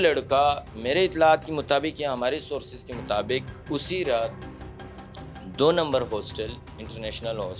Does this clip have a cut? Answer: no; 0 cuts

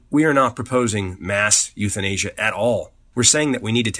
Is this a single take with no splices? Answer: no; 1 cut; at 3.0 s

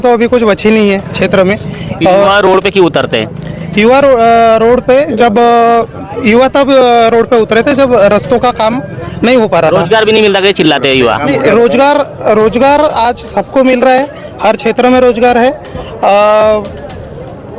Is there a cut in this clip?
no; 0 cuts

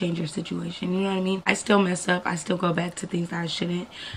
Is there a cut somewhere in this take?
yes; 1 cut; at 1.4 s

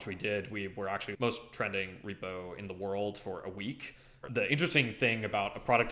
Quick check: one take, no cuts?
no; 2 cuts; at 1.1 s, 4.2 s

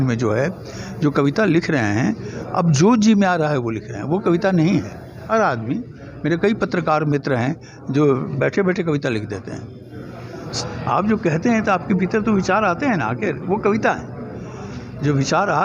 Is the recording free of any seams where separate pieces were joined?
no; 2 cuts; at 5.3 s, 10.5 s

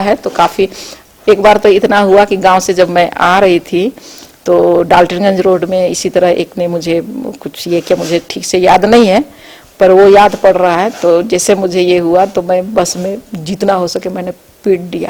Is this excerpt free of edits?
yes; 0 cuts

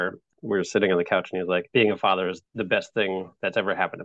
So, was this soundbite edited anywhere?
yes; 2 cuts; at 1.7 s, 2.4 s

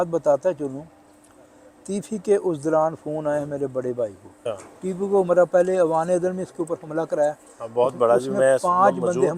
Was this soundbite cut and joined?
yes; 1 cut; at 4.4 s

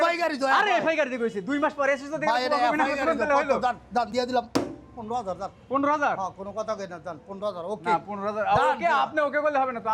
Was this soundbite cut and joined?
no; 0 cuts

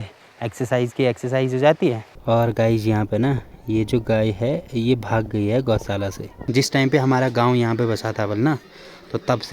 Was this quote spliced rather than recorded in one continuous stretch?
yes; 2 cuts; at 2.1 s, 6.5 s

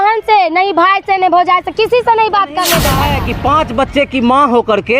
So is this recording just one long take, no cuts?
no; 1 cut; at 3.0 s

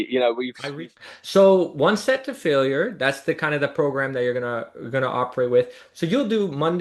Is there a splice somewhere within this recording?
yes; 2 cuts; at 0.8 s, 5.8 s

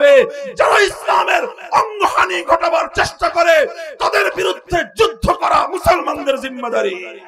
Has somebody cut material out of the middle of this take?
no; 0 cuts

